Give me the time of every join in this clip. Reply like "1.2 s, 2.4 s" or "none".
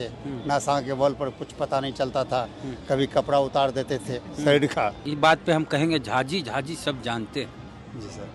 5.0 s

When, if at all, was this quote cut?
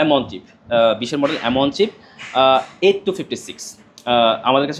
none

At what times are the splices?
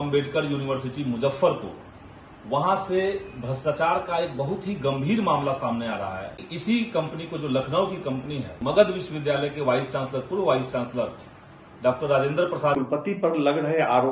6.5 s, 8.5 s, 13.0 s

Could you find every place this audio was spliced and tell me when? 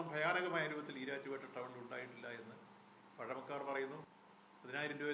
4.1 s

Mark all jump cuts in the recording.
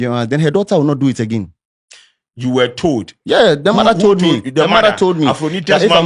none

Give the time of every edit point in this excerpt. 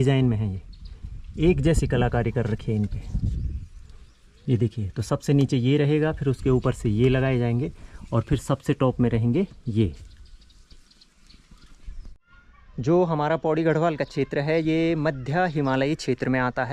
none

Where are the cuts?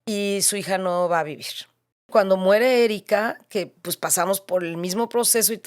2.1 s

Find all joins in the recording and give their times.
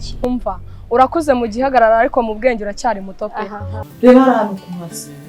3.7 s

